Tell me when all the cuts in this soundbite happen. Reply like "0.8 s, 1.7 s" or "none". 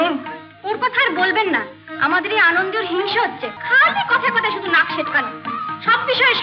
3.5 s